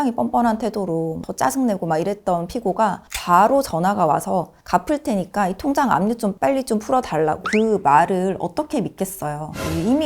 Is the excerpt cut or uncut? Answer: cut